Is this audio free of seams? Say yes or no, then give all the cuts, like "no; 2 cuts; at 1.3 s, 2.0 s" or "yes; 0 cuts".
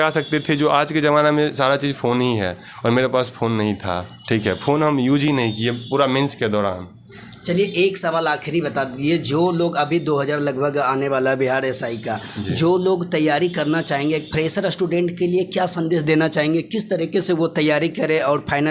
yes; 0 cuts